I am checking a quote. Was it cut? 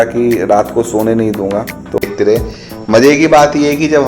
yes; 1 cut; at 2.0 s

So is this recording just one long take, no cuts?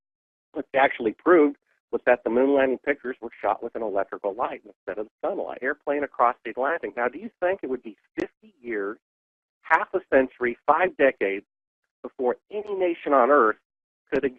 yes; 0 cuts

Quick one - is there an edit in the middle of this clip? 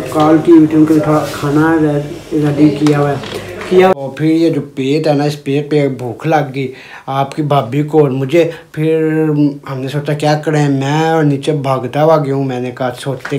yes; 1 cut; at 3.9 s

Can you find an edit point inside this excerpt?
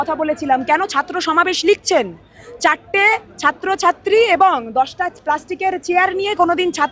no; 0 cuts

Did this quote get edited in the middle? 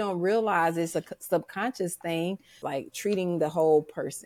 yes; 1 cut; at 2.5 s

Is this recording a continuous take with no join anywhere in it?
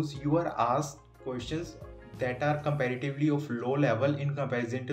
yes; 0 cuts

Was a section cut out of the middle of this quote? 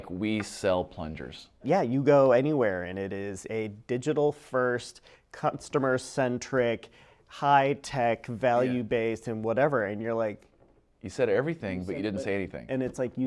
yes; 1 cut; at 1.6 s

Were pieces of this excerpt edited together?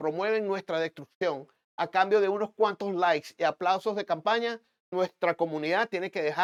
no; 0 cuts

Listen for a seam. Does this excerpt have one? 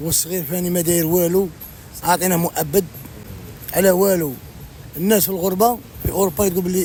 no; 0 cuts

